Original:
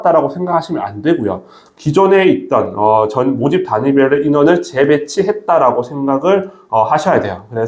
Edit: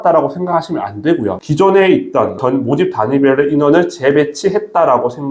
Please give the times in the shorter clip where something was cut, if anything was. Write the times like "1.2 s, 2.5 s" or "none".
1.4 s, 2.4 s